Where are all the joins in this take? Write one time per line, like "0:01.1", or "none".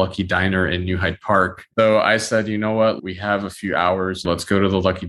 0:01.7
0:04.2